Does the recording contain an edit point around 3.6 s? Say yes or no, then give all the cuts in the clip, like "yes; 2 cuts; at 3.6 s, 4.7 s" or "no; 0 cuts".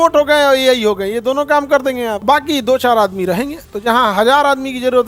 no; 0 cuts